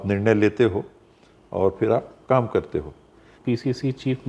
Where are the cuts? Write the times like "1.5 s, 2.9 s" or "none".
3.4 s